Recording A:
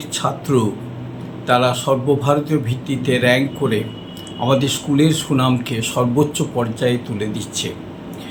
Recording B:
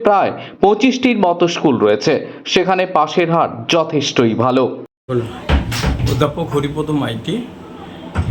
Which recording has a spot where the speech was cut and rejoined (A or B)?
B